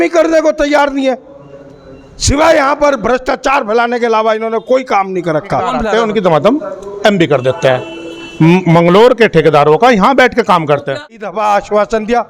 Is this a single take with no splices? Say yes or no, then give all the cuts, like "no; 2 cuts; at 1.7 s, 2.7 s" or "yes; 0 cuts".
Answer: no; 2 cuts; at 5.8 s, 11.0 s